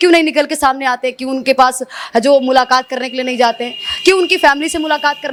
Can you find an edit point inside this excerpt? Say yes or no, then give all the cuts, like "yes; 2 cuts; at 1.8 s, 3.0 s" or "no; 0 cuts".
no; 0 cuts